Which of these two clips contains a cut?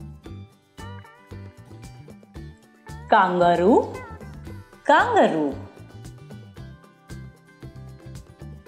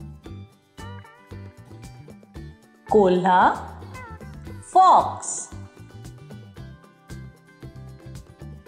second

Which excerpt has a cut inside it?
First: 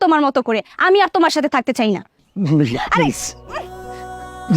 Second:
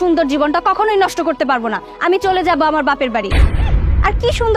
first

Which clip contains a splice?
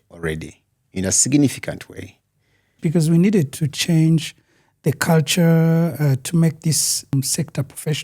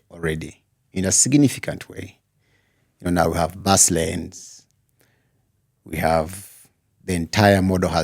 first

